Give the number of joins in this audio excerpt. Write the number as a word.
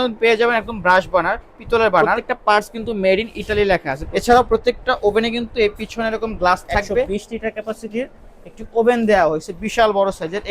three